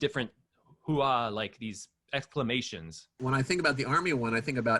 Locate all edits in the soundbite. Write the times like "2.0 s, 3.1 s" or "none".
3.2 s

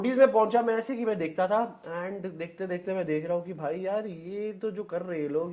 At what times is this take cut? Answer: none

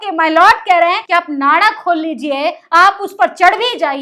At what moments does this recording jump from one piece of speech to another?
1.0 s

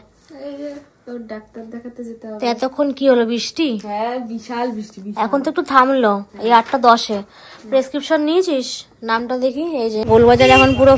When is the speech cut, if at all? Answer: 10.1 s

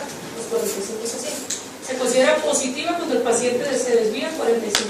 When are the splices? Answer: 3.1 s

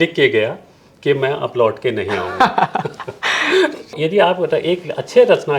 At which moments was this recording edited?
4.0 s

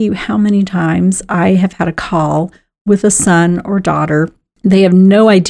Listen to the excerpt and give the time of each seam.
4.4 s

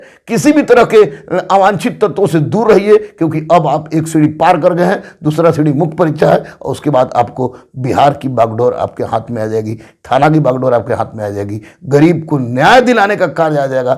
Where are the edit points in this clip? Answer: none

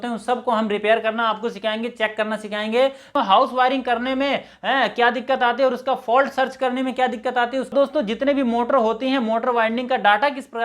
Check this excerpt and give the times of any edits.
3.1 s, 7.7 s

